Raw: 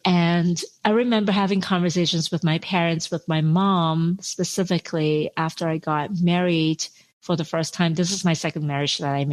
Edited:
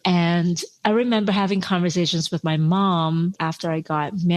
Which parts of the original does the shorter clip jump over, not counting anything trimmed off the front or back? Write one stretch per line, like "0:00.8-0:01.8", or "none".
0:02.4-0:03.2
0:04.2-0:05.4